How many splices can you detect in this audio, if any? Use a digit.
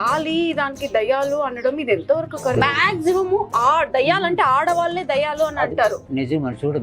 1